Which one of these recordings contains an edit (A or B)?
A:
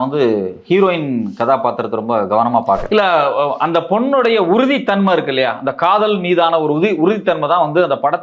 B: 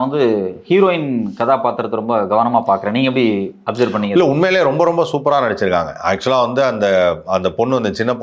A